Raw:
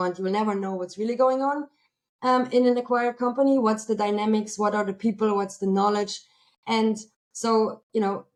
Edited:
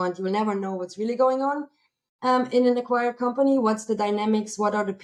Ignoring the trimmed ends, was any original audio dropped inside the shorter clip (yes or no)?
no